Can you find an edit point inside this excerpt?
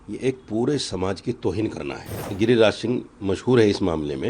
yes; 1 cut; at 2.2 s

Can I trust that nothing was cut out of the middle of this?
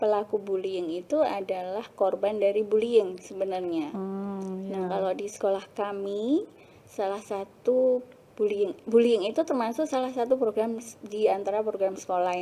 yes; 0 cuts

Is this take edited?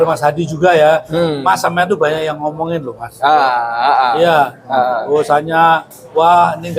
no; 0 cuts

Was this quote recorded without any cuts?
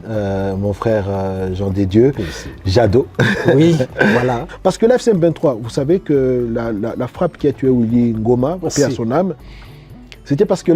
no; 1 cut; at 4.4 s

